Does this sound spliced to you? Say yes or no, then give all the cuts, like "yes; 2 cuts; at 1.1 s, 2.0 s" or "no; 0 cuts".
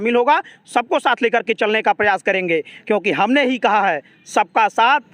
no; 0 cuts